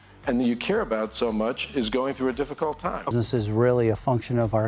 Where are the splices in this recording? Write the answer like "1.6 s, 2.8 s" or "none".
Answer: 3.1 s